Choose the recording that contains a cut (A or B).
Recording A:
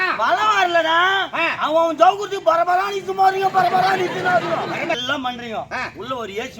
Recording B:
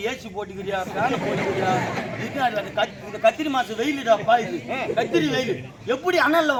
A